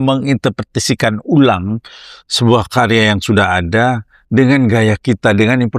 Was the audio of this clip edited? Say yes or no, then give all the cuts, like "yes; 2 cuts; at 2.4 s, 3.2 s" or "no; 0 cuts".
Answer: no; 0 cuts